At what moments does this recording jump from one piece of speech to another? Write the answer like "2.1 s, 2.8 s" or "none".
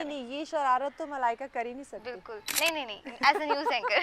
2.5 s